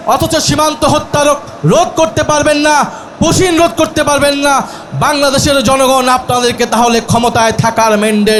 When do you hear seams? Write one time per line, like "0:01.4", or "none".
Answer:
none